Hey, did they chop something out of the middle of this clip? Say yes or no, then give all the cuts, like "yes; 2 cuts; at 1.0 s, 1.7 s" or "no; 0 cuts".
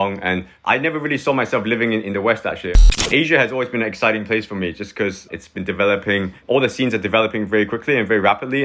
yes; 1 cut; at 2.8 s